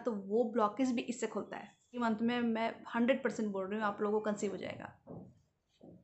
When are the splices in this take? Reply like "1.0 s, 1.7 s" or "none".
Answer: 2.0 s